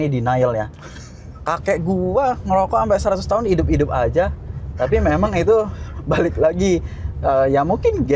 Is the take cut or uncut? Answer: uncut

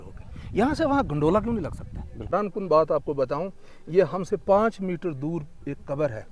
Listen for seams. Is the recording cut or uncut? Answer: cut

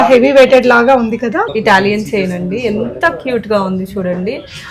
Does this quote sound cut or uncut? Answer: cut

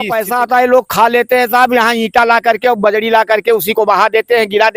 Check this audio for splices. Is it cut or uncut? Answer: uncut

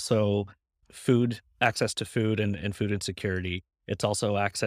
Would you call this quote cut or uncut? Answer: uncut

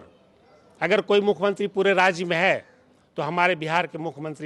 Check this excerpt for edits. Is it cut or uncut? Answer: uncut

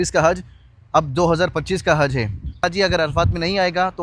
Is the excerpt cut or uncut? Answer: cut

